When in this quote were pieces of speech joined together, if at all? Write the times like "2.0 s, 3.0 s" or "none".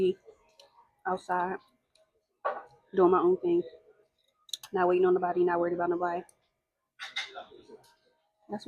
none